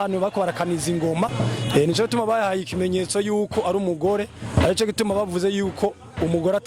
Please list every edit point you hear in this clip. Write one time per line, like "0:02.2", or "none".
0:01.3